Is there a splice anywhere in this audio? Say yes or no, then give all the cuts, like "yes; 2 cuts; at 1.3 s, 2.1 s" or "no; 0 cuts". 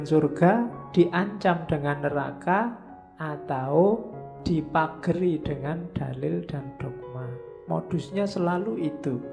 yes; 1 cut; at 4.3 s